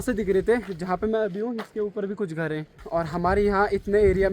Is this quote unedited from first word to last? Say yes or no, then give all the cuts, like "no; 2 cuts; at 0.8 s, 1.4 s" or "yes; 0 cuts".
no; 1 cut; at 2.8 s